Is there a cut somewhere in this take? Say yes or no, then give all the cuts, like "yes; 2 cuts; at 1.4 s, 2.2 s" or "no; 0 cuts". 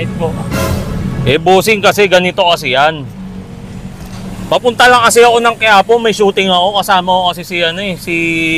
no; 0 cuts